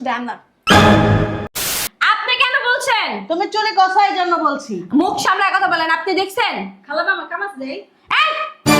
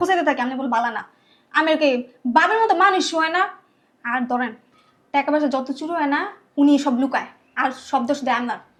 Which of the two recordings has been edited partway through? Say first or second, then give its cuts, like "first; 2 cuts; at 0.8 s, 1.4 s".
first; 1 cut; at 1.5 s